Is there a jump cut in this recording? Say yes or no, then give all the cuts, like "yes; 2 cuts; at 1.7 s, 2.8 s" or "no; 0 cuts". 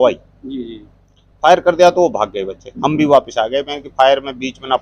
no; 0 cuts